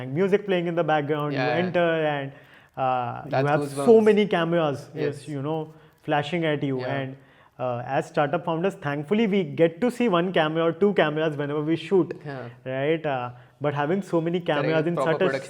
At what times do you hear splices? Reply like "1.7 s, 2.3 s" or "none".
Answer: none